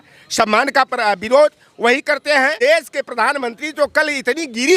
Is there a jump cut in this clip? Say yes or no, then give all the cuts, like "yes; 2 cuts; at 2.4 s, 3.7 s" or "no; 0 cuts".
yes; 1 cut; at 2.5 s